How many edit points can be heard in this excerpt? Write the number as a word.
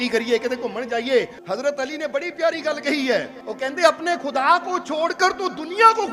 two